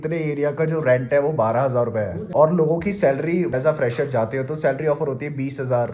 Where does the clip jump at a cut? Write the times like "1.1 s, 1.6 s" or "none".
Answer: 2.3 s, 3.5 s